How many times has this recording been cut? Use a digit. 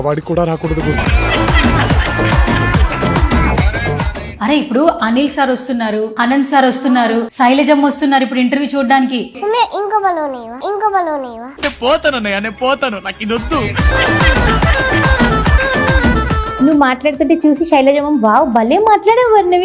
0